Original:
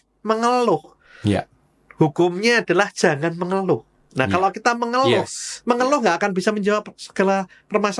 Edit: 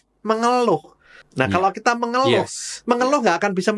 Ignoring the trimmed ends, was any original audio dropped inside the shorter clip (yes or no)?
yes